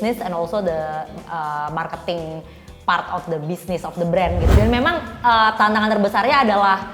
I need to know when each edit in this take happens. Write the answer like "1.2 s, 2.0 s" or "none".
4.5 s